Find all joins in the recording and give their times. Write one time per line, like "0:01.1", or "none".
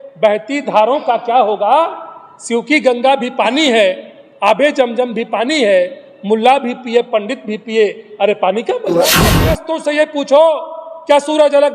0:09.4